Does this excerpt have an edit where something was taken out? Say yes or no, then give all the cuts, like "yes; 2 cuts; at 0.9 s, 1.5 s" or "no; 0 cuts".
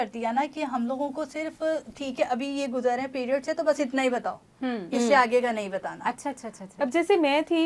yes; 1 cut; at 6.6 s